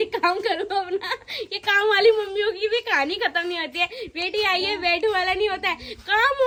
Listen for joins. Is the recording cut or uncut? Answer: uncut